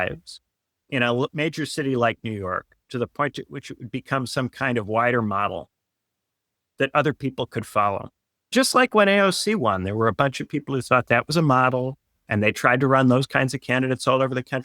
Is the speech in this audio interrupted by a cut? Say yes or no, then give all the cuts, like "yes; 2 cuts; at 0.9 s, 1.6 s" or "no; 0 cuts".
yes; 1 cut; at 8.5 s